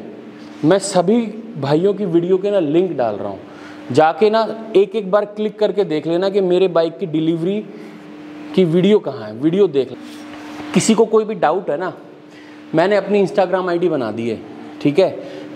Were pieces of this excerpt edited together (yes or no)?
yes